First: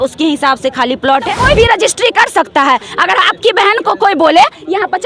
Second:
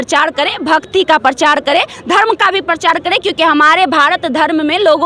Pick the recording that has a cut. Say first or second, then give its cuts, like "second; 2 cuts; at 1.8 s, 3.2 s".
first; 1 cut; at 1.4 s